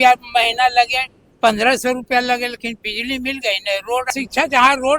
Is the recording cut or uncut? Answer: cut